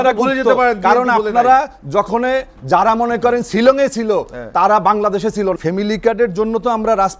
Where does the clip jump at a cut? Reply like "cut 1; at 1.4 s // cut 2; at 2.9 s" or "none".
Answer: cut 1; at 5.6 s